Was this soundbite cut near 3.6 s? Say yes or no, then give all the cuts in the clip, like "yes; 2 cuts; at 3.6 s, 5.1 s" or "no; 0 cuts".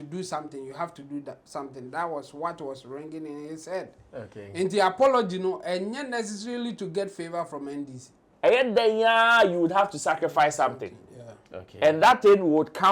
no; 1 cut; at 8.2 s